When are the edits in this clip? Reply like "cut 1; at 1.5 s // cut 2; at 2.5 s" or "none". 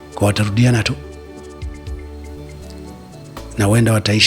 cut 1; at 1.0 s // cut 2; at 2.9 s